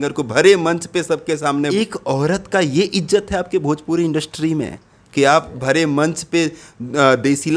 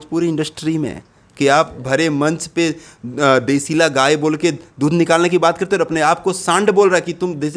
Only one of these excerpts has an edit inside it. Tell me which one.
first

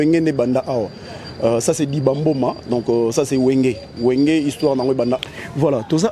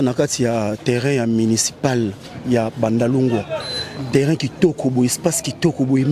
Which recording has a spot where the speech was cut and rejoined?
first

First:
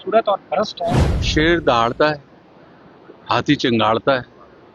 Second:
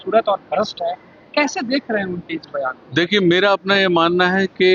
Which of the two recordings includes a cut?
first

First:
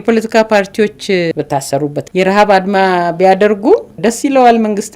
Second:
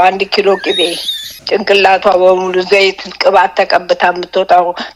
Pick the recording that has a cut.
first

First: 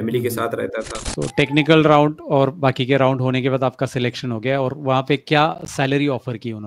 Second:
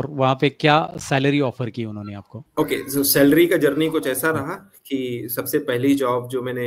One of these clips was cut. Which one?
first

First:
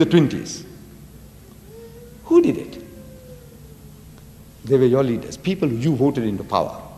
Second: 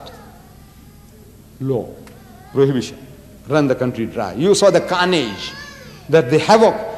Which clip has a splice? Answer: second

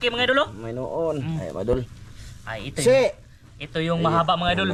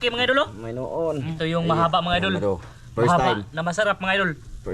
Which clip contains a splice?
second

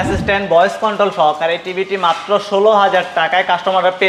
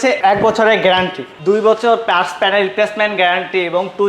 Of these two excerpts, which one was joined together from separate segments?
second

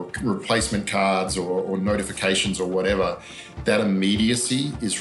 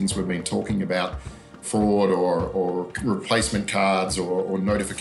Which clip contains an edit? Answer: second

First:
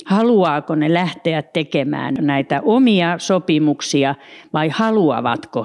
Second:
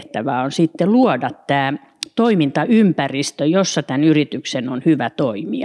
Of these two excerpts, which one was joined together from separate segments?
first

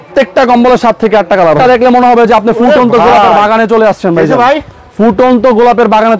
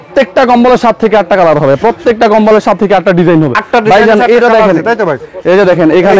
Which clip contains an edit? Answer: first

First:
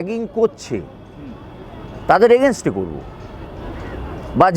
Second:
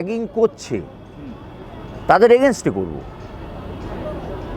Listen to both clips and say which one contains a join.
first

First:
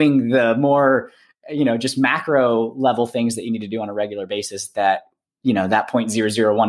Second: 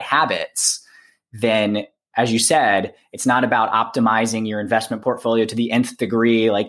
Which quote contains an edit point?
second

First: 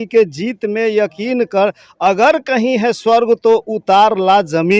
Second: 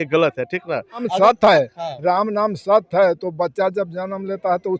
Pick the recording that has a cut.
second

